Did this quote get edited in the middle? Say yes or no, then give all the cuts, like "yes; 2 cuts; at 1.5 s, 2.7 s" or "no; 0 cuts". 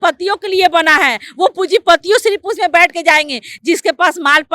no; 0 cuts